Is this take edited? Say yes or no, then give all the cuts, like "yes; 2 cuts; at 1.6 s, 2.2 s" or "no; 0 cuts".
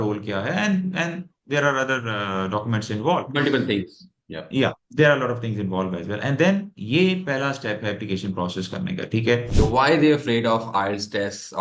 yes; 1 cut; at 9.5 s